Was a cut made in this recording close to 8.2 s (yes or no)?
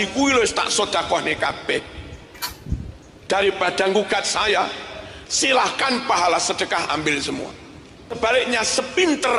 yes